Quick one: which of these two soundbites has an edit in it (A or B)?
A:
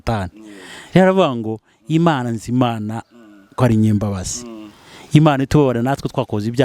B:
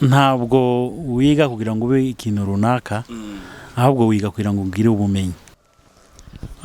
B